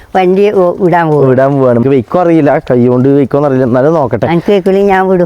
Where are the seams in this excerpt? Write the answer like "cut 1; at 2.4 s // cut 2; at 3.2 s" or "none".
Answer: cut 1; at 1.8 s